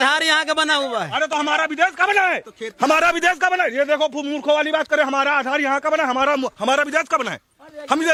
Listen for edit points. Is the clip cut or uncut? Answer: uncut